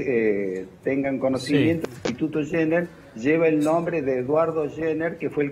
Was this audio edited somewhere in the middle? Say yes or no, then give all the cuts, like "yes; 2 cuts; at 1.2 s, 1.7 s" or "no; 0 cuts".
no; 0 cuts